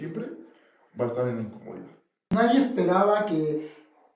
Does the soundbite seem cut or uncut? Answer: cut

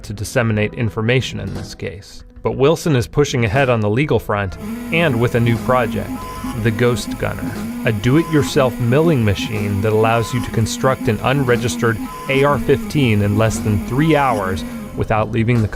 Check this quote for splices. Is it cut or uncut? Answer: uncut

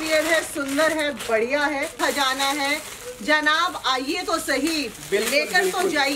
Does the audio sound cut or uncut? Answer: cut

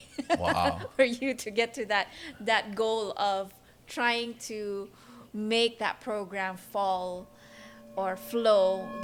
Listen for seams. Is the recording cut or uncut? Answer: uncut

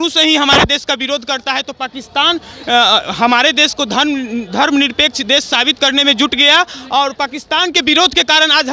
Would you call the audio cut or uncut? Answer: uncut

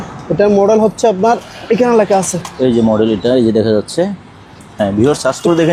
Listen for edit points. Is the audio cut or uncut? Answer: uncut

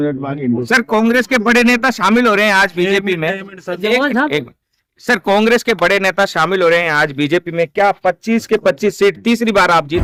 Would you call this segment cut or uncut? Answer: uncut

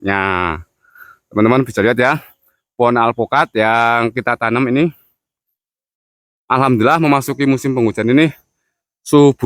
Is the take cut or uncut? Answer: uncut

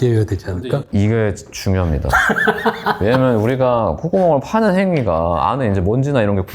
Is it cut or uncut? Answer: uncut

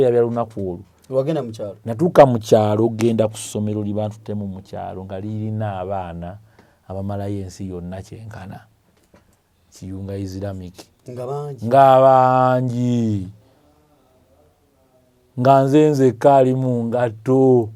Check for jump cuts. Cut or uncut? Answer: uncut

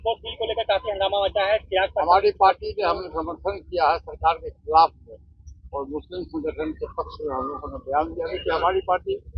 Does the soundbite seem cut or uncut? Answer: uncut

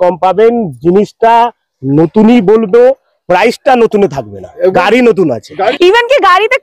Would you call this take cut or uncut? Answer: cut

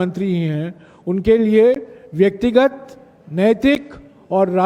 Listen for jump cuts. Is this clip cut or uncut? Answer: uncut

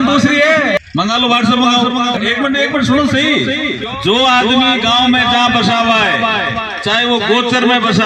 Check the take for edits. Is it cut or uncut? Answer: cut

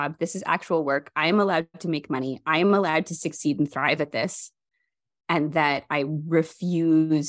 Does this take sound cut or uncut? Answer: uncut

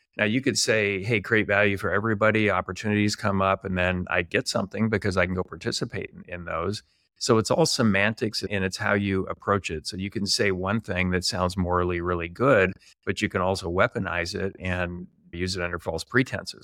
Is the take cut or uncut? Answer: uncut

